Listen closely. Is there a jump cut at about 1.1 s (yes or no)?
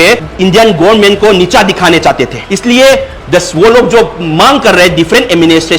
no